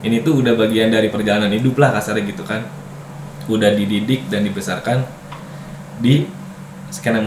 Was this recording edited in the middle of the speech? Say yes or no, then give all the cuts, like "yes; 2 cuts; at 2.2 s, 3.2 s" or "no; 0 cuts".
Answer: no; 0 cuts